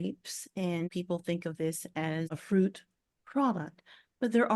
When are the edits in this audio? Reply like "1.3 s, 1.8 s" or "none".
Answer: 0.9 s, 2.4 s